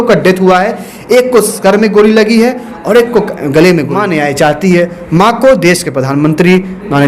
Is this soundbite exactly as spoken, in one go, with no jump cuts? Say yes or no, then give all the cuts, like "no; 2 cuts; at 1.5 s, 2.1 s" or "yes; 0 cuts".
no; 1 cut; at 3.9 s